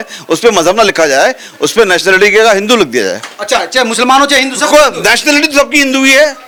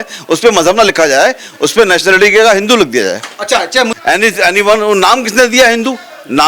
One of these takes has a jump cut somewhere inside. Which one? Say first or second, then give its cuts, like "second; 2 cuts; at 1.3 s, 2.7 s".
second; 1 cut; at 3.9 s